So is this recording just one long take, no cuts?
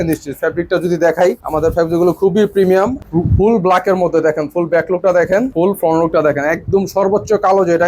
no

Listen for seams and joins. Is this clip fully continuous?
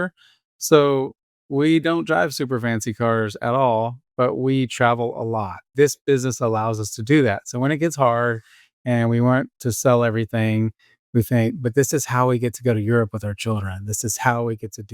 no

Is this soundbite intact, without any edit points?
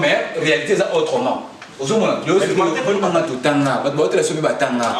no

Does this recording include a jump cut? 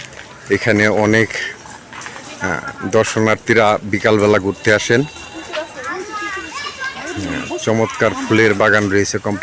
no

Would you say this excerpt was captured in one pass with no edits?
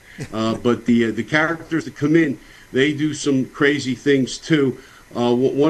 yes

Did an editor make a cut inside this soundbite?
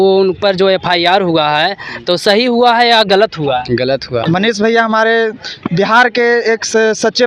yes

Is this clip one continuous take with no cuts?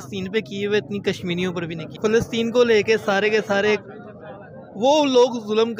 no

